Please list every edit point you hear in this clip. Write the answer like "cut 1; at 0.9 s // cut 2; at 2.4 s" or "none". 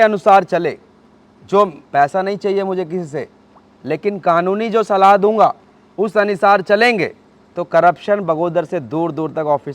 none

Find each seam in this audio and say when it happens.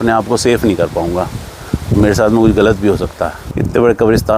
cut 1; at 3.4 s

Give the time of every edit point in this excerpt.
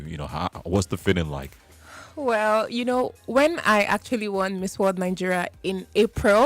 none

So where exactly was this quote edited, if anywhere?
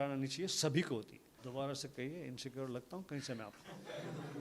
cut 1; at 1.4 s

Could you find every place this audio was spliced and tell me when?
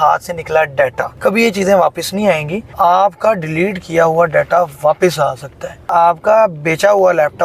cut 1; at 1.1 s // cut 2; at 2.7 s // cut 3; at 5.9 s

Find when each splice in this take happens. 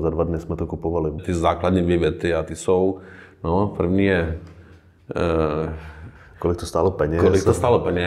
cut 1; at 1.2 s

